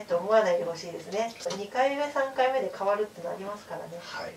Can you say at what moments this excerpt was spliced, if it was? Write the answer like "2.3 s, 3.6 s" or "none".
1.5 s